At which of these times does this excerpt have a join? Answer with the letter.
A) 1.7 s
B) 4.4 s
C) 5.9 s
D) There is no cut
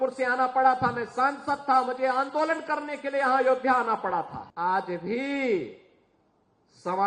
B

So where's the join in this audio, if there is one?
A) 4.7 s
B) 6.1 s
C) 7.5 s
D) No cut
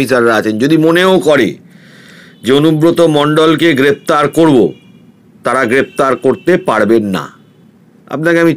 D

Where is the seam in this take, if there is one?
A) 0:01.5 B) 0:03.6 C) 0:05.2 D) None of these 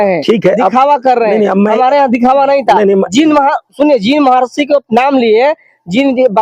D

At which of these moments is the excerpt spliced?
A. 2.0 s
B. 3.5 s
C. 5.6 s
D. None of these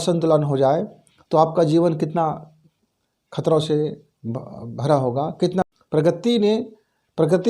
C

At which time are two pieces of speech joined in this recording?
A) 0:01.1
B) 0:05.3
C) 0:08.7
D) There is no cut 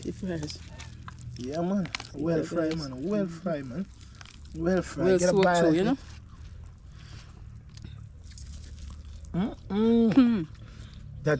D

